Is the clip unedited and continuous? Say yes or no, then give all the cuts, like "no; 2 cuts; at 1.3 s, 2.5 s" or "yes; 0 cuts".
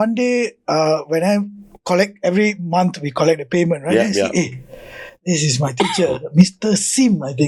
yes; 0 cuts